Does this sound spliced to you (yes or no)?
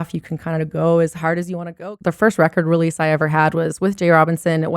yes